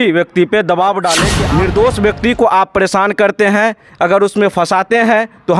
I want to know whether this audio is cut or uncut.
cut